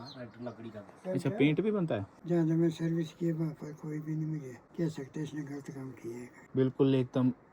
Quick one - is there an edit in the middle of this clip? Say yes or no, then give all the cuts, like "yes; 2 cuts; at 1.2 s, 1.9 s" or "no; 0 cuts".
yes; 3 cuts; at 2.1 s, 4.6 s, 6.4 s